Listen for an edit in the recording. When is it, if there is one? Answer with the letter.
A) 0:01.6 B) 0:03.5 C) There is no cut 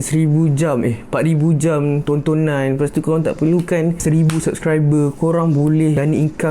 C